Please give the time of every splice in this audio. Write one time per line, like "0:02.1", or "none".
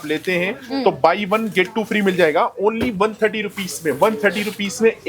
none